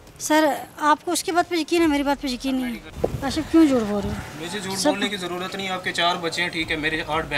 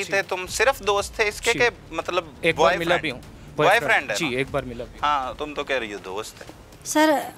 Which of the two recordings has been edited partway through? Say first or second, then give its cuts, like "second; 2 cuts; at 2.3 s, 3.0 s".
first; 1 cut; at 2.8 s